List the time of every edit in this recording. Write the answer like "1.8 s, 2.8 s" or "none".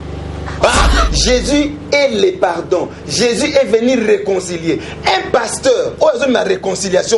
1.0 s